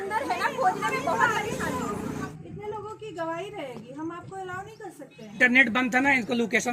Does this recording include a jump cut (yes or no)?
yes